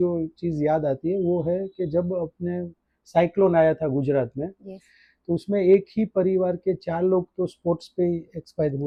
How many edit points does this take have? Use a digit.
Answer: 0